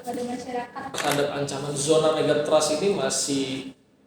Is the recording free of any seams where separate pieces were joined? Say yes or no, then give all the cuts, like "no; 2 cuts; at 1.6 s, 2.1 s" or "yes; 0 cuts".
no; 1 cut; at 1.0 s